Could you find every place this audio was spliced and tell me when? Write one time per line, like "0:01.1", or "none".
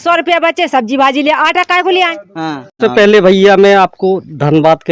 0:02.8